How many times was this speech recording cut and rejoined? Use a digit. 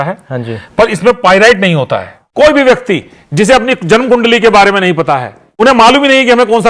2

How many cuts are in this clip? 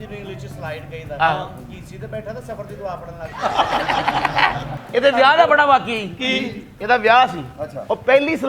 1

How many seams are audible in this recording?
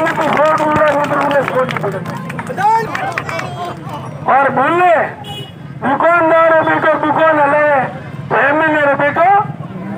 1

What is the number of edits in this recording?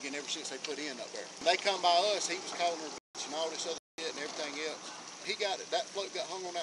2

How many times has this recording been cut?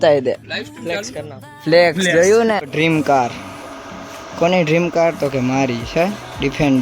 1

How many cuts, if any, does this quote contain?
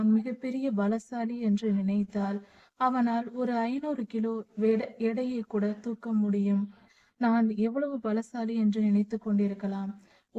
0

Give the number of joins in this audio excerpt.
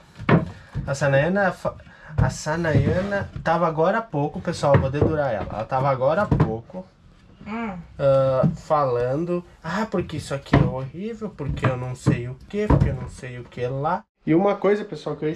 1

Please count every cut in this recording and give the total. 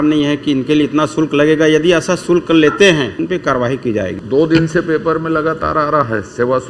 2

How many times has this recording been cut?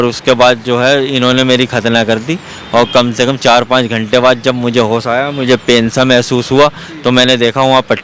0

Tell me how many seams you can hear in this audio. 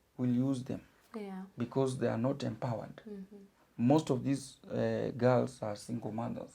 0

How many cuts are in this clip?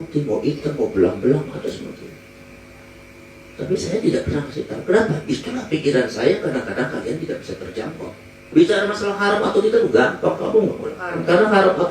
1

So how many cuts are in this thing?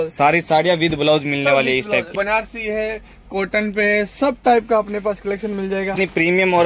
2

